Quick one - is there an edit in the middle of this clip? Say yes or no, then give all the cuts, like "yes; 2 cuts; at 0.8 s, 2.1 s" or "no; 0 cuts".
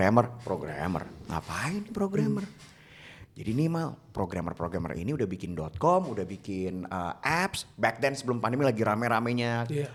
no; 0 cuts